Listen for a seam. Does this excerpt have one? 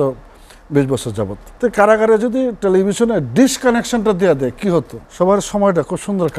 yes; 2 cuts; at 1.4 s, 5.0 s

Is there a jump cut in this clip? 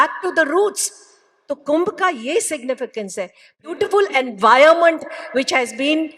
yes; 1 cut; at 3.7 s

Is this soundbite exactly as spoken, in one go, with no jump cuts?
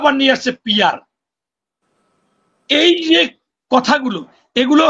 yes; 0 cuts

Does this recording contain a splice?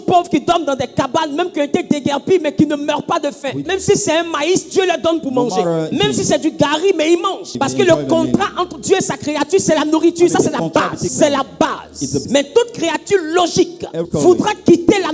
yes; 6 cuts; at 3.6 s, 5.9 s, 7.5 s, 11.1 s, 12.2 s, 14.0 s

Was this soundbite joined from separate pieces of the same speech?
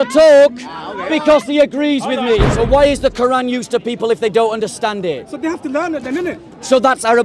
yes; 1 cut; at 2.5 s

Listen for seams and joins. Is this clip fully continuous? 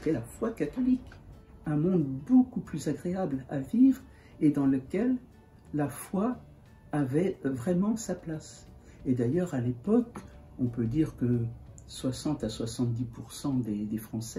no; 1 cut; at 1.1 s

